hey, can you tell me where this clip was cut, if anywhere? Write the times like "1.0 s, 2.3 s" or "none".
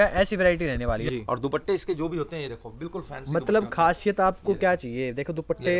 1.1 s

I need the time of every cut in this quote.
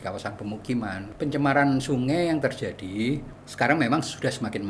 1.0 s, 3.4 s

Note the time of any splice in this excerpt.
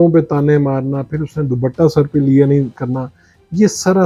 none

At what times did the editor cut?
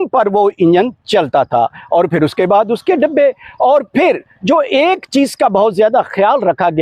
none

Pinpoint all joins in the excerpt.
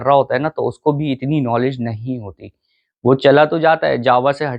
none

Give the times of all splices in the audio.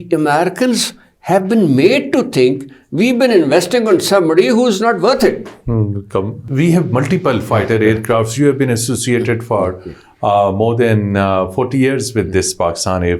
6.4 s

